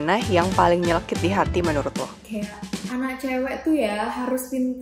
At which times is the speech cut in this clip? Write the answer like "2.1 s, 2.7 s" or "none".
2.8 s